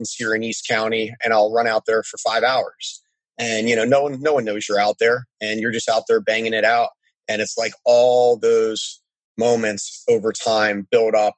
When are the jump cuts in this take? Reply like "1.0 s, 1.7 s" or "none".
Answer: 1.2 s

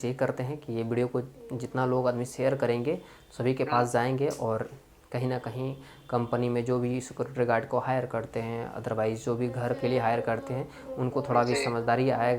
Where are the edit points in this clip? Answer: none

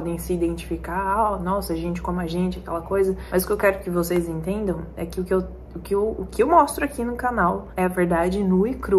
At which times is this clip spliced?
none

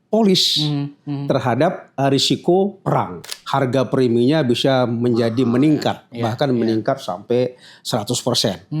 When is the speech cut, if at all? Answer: 3.3 s

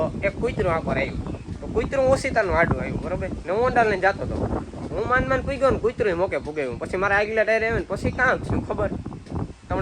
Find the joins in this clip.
none

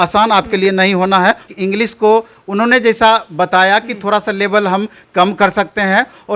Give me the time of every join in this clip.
1.5 s

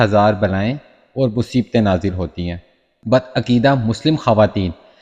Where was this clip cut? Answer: 3.0 s

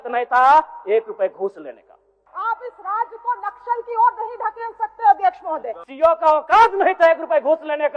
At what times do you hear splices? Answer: 2.2 s, 5.8 s

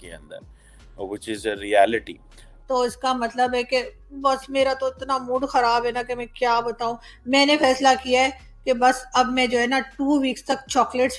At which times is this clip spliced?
2.5 s

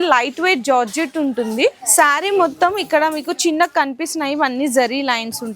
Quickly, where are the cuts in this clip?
1.8 s

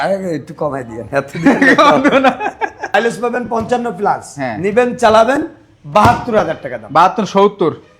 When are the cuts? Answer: 2.9 s

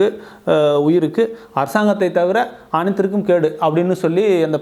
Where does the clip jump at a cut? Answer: none

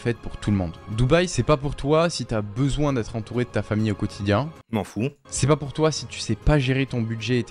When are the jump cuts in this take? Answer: 1.3 s, 5.3 s

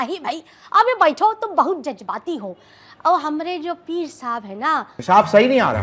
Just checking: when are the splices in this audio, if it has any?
4.9 s

